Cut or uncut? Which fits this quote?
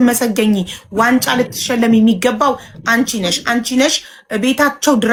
uncut